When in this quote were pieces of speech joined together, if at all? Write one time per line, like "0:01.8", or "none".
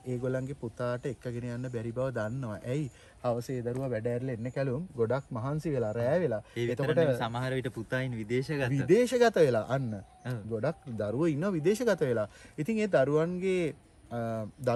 none

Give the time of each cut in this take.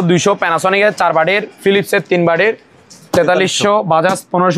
none

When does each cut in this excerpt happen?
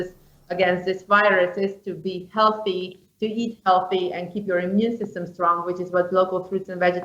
none

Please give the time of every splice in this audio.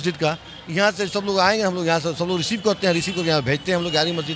none

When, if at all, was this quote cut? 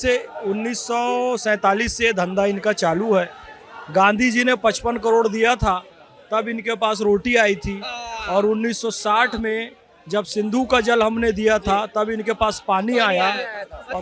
none

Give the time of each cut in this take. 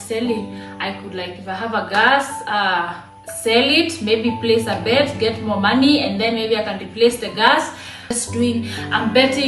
0:08.2

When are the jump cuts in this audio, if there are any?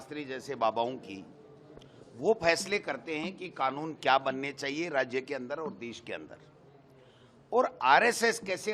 none

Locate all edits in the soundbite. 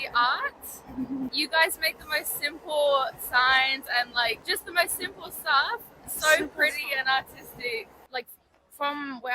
0:01.3
0:04.4
0:08.0

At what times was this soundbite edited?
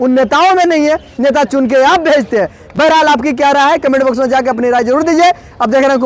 none

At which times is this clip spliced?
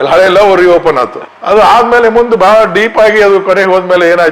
none

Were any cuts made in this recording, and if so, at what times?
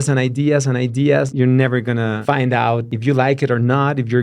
0:01.3
0:02.2
0:02.9

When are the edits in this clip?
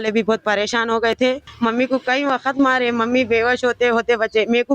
0:01.5

